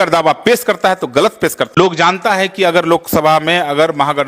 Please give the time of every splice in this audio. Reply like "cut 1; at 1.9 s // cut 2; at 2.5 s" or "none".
cut 1; at 1.6 s